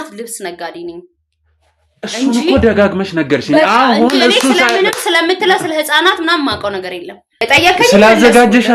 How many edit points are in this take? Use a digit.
1